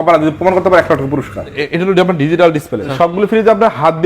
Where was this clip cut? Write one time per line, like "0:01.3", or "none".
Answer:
0:01.6
0:02.9